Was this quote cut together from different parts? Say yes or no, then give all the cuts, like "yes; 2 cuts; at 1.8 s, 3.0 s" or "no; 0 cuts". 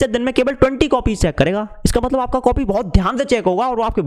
no; 0 cuts